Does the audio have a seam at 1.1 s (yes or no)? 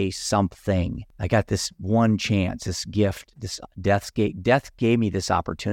yes